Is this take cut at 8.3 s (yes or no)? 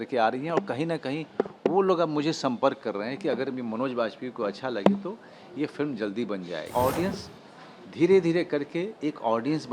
no